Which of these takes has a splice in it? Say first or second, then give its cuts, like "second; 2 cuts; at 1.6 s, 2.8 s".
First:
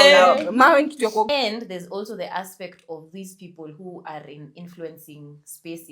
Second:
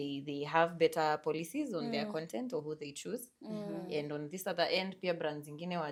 first; 1 cut; at 1.3 s